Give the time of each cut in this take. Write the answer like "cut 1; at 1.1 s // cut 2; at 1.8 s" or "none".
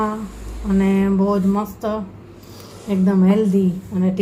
none